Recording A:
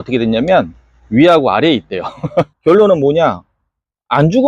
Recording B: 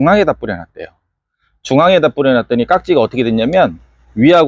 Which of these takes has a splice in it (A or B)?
A